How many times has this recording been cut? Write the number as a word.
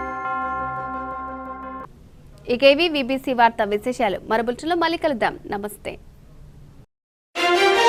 zero